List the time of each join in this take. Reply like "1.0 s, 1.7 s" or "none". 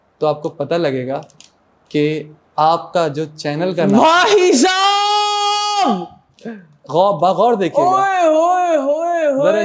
none